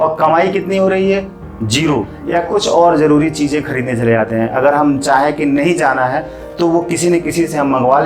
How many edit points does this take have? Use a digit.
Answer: 1